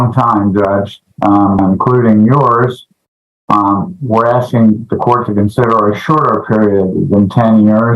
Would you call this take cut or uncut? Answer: cut